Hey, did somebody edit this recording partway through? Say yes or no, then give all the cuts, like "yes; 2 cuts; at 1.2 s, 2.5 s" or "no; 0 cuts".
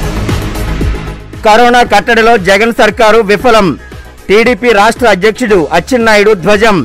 yes; 1 cut; at 1.0 s